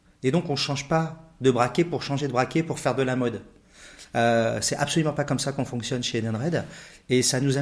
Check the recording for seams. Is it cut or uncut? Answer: uncut